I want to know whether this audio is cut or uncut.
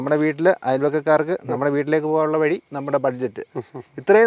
uncut